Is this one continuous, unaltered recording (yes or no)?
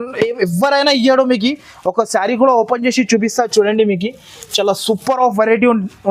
yes